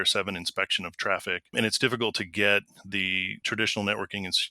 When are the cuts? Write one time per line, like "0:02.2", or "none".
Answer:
0:01.5
0:03.4